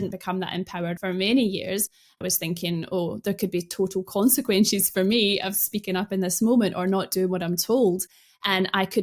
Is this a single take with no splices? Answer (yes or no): no